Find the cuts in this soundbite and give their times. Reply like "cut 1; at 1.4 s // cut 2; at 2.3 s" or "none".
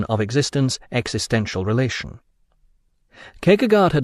none